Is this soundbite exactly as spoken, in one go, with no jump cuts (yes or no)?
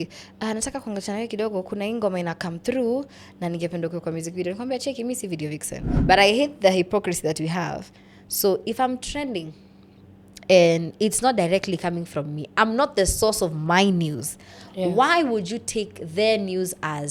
no